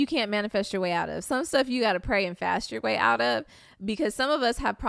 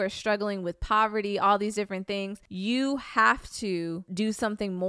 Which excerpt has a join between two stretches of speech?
second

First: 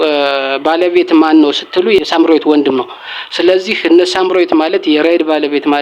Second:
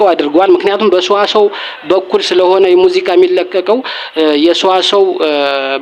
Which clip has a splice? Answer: first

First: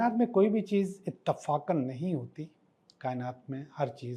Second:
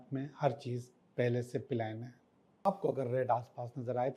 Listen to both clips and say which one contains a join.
second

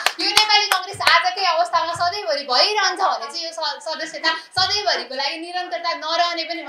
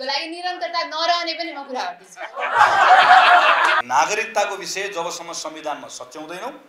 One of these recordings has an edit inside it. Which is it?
second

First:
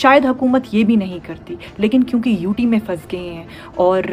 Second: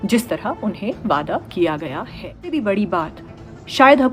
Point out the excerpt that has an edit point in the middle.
second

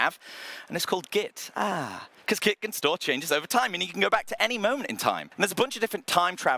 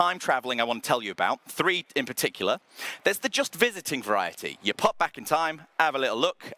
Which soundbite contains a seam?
first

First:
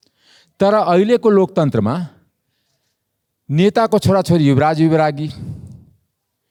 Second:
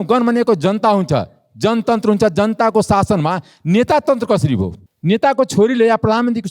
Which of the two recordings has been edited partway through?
second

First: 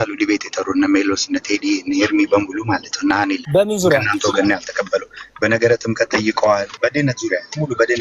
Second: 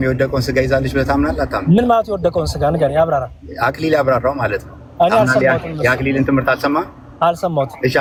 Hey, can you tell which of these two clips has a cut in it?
first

